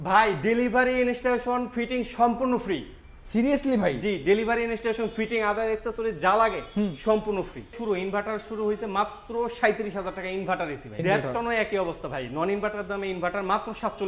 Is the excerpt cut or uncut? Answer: cut